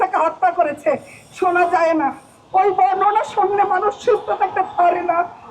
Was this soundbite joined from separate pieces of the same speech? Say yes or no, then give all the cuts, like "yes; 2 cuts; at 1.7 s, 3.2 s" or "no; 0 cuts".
no; 0 cuts